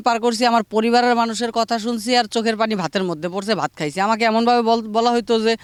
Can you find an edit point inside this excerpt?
no; 0 cuts

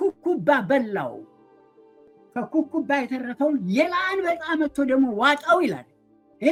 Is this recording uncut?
yes; 0 cuts

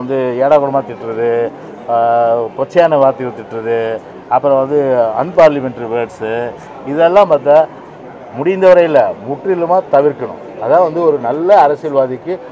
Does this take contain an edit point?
no; 0 cuts

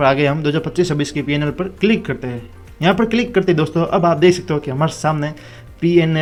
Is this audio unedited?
yes; 0 cuts

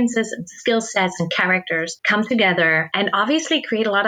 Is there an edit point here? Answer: yes; 2 cuts; at 2.0 s, 2.9 s

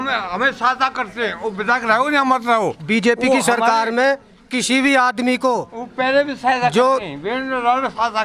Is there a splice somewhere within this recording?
no; 0 cuts

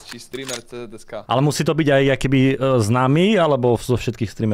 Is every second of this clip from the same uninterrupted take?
no; 1 cut; at 1.2 s

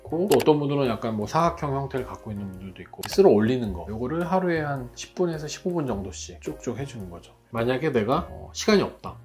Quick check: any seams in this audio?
yes; 2 cuts; at 3.0 s, 7.5 s

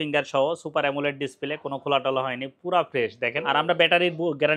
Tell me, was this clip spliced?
yes; 1 cut; at 3.4 s

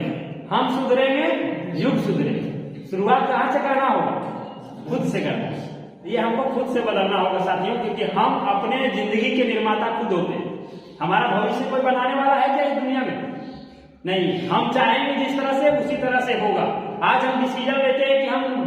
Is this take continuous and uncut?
no; 1 cut; at 6.0 s

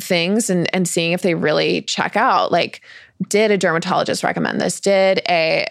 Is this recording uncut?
yes; 0 cuts

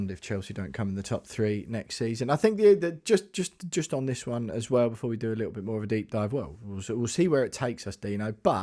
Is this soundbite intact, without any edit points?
yes; 0 cuts

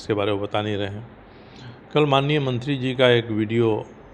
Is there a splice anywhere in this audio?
no; 0 cuts

